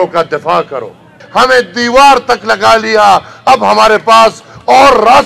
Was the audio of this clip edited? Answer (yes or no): yes